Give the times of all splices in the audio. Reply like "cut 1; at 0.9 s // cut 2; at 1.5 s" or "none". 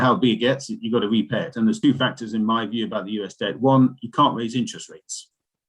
cut 1; at 1.8 s